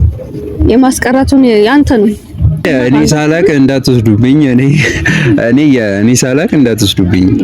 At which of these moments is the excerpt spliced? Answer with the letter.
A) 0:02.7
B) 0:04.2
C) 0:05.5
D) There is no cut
A